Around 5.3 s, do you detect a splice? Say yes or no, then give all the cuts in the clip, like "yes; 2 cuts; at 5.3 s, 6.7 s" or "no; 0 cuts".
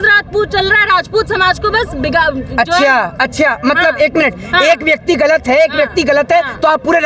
no; 0 cuts